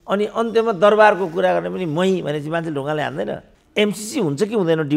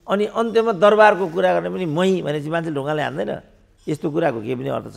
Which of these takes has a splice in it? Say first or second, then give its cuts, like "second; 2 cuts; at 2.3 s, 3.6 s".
first; 1 cut; at 3.5 s